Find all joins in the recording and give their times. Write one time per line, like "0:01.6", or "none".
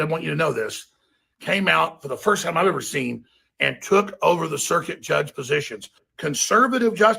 0:06.0